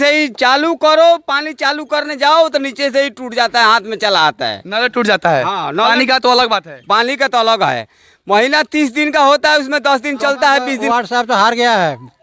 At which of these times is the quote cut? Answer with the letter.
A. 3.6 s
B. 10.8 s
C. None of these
B